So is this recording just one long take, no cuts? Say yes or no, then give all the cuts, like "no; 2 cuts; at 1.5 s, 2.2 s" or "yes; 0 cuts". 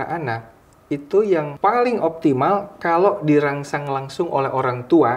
no; 1 cut; at 1.5 s